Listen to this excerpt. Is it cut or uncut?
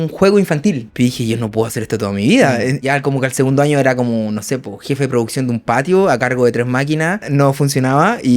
cut